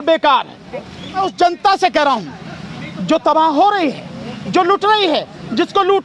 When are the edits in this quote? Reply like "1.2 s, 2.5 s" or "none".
1.2 s